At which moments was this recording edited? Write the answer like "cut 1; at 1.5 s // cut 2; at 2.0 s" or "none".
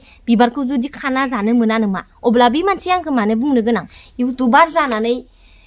cut 1; at 2.1 s // cut 2; at 4.0 s